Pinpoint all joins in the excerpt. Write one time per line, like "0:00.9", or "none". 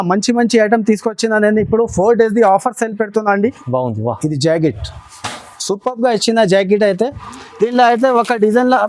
0:03.6